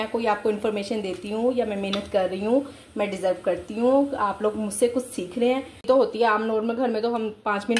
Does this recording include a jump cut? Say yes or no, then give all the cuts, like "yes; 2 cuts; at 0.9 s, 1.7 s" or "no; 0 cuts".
yes; 1 cut; at 5.8 s